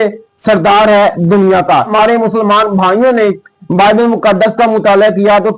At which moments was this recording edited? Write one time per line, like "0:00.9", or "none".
0:01.9